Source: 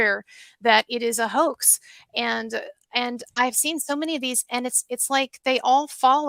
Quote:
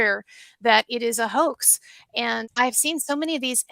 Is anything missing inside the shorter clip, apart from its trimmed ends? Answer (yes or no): yes